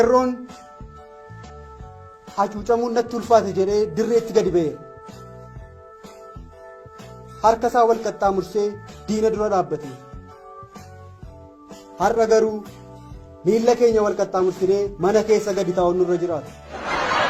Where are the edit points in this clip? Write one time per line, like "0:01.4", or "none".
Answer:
0:01.5